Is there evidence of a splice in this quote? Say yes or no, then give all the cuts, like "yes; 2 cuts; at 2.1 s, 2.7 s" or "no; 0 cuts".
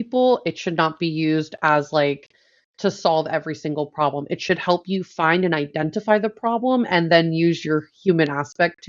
no; 0 cuts